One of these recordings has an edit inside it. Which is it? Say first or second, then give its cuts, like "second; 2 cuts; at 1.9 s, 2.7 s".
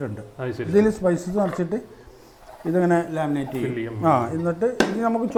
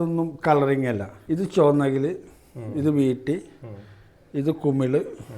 second; 1 cut; at 1.1 s